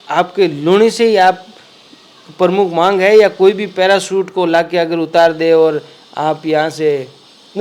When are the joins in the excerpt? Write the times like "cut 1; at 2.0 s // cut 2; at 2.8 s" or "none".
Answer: none